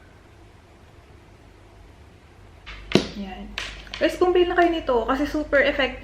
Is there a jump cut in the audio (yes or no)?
yes